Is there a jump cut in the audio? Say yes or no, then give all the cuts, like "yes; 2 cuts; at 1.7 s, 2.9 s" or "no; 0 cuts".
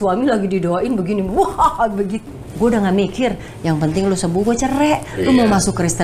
yes; 1 cut; at 2.2 s